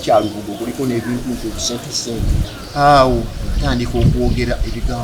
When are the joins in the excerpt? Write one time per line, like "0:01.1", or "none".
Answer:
0:02.5